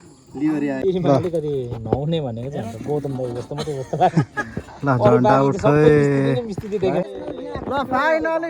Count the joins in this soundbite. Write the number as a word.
two